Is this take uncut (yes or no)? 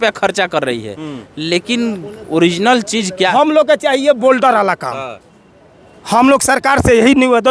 no